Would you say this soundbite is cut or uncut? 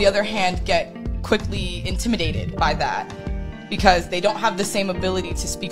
uncut